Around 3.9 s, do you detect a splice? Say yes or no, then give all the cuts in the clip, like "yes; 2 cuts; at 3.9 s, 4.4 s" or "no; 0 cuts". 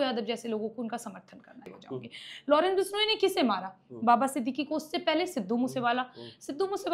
no; 1 cut; at 1.5 s